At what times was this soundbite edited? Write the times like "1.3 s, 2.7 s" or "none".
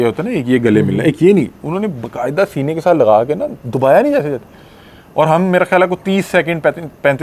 none